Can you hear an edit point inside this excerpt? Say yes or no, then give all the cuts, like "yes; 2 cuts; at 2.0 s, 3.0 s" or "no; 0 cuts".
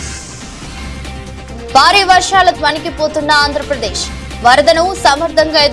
yes; 1 cut; at 1.7 s